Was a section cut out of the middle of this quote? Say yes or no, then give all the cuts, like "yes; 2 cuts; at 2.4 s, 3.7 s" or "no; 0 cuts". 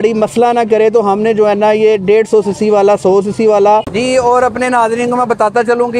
yes; 1 cut; at 3.9 s